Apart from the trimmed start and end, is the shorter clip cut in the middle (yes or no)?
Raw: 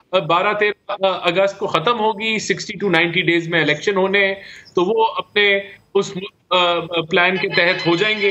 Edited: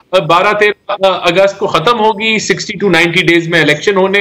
no